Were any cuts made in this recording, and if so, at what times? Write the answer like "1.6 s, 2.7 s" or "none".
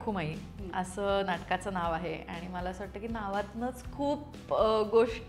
none